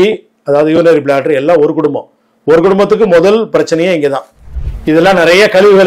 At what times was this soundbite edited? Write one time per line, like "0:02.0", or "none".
0:04.6